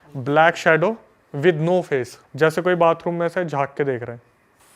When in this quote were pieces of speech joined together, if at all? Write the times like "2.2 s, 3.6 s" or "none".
2.2 s